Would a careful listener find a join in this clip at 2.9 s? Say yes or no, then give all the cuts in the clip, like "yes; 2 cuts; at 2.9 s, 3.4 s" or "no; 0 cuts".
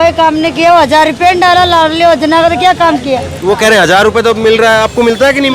no; 0 cuts